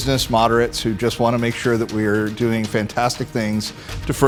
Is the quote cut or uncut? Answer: uncut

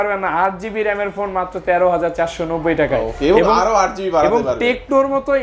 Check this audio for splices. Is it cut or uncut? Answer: uncut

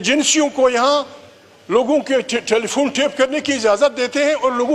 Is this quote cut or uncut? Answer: uncut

